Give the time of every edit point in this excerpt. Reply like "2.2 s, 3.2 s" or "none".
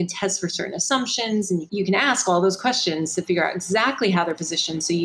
1.7 s